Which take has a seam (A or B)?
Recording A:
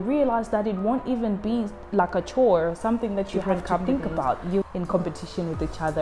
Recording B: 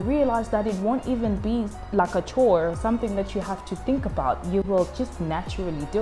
A